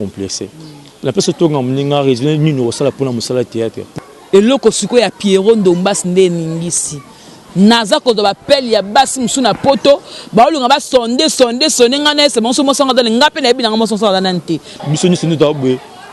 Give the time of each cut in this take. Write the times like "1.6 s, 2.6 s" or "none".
3.8 s, 14.7 s